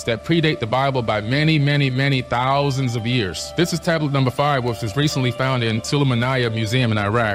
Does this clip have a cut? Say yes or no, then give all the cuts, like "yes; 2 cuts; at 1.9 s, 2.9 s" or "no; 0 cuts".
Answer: no; 0 cuts